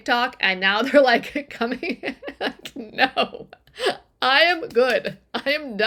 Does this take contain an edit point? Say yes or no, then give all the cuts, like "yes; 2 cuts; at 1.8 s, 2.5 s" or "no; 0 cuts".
no; 0 cuts